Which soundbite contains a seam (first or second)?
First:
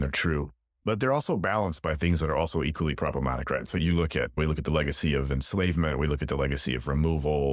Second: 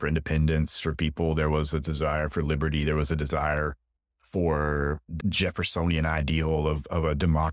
second